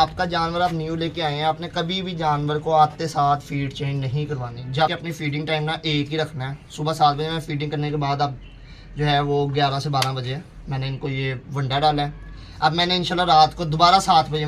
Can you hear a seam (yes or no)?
yes